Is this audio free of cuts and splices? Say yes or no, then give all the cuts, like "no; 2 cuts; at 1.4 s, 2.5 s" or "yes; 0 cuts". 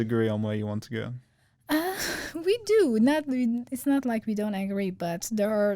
yes; 0 cuts